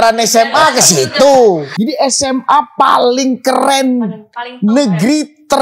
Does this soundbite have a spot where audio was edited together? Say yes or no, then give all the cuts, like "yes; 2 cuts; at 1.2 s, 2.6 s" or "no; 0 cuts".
yes; 1 cut; at 1.7 s